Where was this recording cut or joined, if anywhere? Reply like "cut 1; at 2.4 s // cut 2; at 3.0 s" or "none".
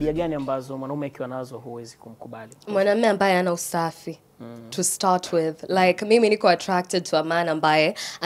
none

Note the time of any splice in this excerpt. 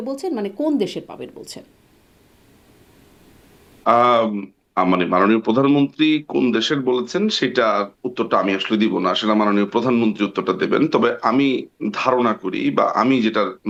none

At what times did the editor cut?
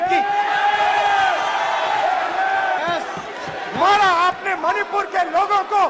cut 1; at 2.8 s

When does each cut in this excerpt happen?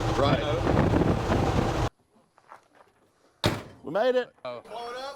cut 1; at 1.9 s // cut 2; at 4.4 s

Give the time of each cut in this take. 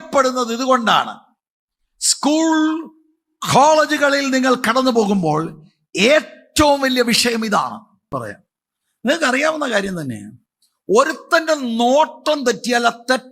cut 1; at 8.1 s

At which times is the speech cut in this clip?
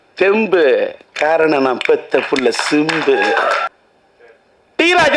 cut 1; at 3.6 s

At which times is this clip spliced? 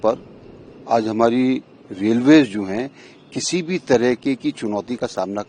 none

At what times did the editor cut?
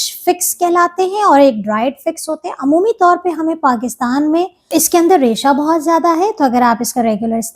cut 1; at 4.6 s

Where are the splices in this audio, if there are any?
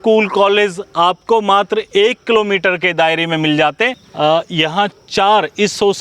cut 1; at 4.0 s

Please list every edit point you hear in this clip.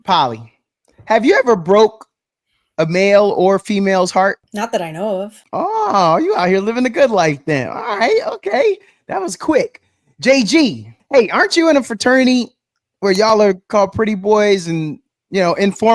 cut 1; at 4.4 s // cut 2; at 5.4 s // cut 3; at 10.9 s

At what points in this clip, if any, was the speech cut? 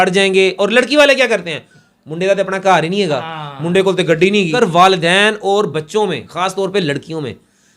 cut 1; at 4.6 s

